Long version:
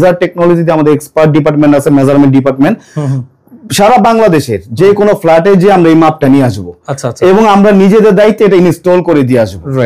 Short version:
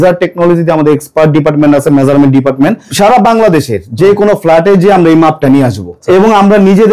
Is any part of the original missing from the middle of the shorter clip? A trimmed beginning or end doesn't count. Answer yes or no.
yes